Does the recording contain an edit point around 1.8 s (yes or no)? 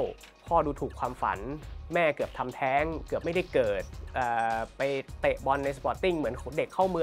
no